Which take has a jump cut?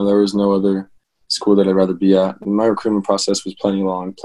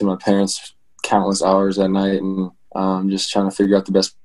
second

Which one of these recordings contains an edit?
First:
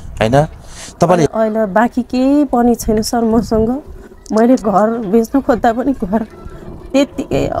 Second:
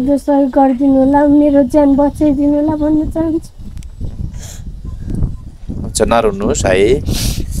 first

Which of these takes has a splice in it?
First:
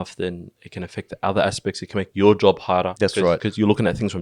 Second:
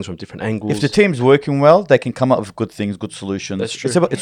first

